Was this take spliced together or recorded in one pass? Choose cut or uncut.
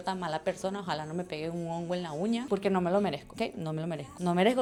uncut